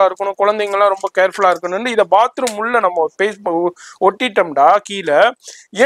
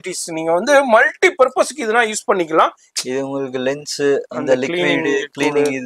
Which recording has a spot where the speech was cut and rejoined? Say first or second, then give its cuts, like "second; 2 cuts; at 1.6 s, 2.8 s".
second; 1 cut; at 2.9 s